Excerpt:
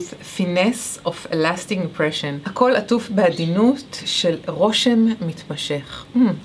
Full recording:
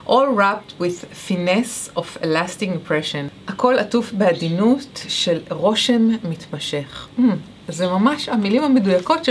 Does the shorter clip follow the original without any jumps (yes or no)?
no